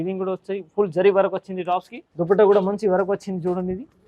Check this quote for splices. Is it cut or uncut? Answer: cut